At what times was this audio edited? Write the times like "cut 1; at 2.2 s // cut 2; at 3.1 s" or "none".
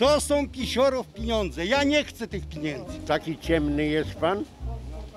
cut 1; at 2.9 s